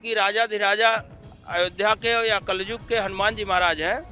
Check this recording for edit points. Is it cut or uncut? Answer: uncut